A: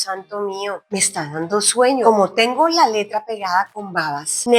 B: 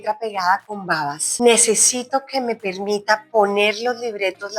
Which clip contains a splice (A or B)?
A